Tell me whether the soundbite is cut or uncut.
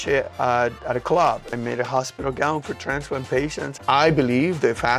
cut